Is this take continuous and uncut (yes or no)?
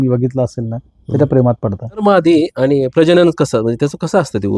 no